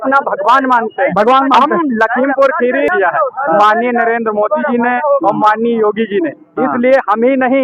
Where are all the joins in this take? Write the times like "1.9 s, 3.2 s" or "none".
2.9 s